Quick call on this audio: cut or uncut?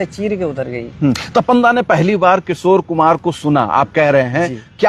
uncut